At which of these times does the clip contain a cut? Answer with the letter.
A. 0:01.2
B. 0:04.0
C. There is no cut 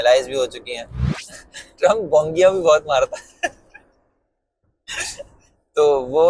A